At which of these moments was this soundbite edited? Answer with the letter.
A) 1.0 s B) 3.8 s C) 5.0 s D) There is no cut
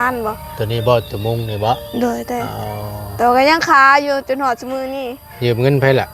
D